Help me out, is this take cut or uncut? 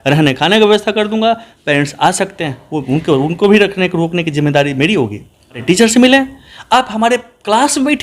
cut